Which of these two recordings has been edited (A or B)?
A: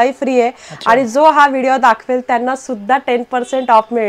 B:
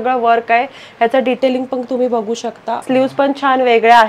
B